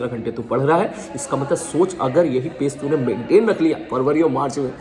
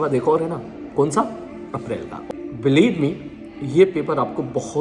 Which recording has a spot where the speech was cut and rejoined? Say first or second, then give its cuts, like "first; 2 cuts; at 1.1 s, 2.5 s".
second; 1 cut; at 2.3 s